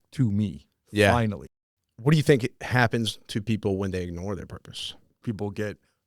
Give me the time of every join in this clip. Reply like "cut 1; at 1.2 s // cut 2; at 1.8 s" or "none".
cut 1; at 1.4 s // cut 2; at 2.6 s // cut 3; at 5.2 s